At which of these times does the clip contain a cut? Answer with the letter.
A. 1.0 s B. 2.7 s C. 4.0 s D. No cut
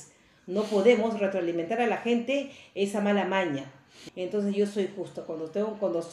C